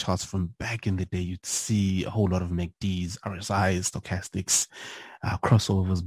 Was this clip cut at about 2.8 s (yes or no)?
no